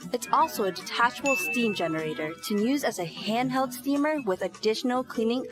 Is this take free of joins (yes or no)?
yes